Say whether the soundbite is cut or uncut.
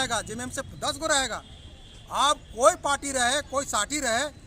uncut